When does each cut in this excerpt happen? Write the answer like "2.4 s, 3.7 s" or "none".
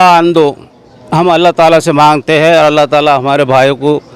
none